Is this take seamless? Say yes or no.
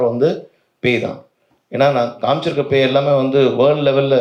yes